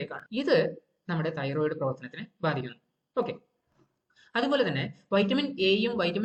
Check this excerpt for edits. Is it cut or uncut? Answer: uncut